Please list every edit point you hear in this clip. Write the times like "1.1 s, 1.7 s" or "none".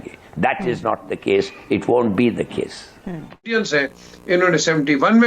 3.5 s

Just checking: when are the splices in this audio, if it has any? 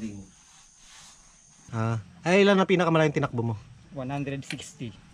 1.6 s

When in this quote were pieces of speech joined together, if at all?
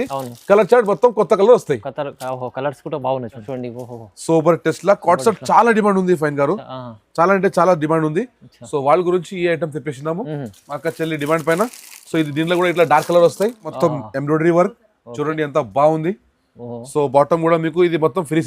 3.4 s, 13.7 s

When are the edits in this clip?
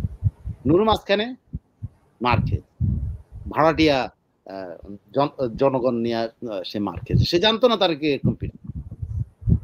none

